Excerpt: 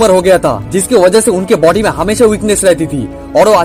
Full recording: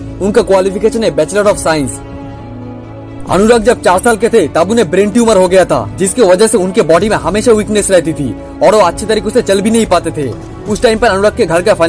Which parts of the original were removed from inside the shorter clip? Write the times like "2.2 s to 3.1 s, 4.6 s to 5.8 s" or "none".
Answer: none

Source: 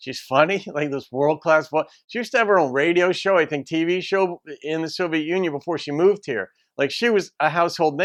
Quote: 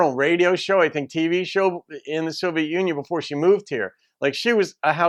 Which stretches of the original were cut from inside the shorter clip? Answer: none

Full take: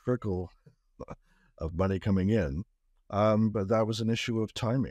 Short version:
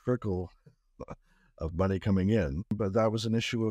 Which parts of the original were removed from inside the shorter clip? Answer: 2.8 s to 3.5 s

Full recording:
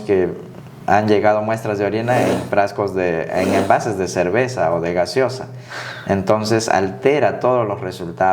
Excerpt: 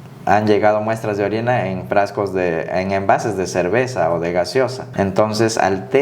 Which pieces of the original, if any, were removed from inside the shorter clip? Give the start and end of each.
5.4 s to 5.9 s

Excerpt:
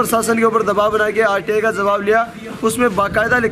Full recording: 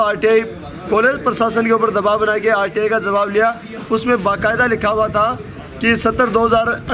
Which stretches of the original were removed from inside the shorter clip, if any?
none

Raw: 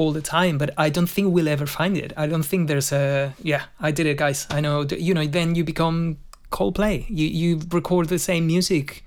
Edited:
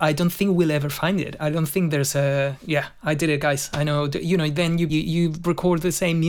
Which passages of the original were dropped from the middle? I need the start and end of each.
5.7 s to 7.2 s

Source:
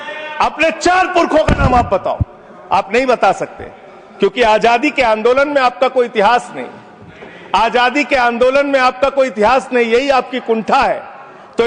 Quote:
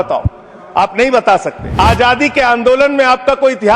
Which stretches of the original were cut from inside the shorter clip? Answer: 3.5 s to 7.3 s

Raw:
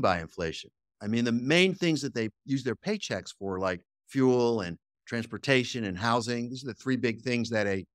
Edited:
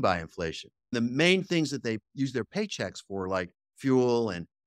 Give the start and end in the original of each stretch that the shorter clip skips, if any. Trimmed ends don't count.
0.9 s to 1.2 s

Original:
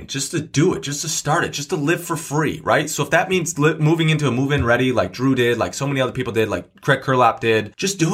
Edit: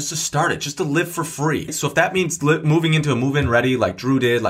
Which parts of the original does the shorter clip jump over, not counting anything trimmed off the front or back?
2.6 s to 2.9 s

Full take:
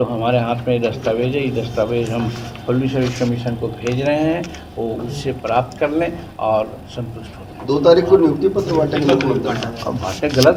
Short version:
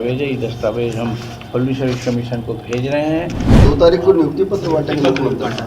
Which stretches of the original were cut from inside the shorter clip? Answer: 4.6 s to 7.5 s

